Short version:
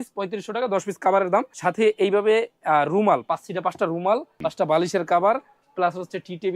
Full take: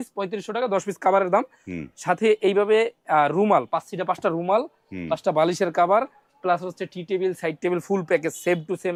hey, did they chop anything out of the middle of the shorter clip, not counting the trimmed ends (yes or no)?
yes